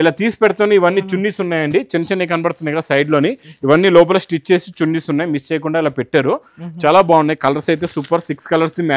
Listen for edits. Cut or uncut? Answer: uncut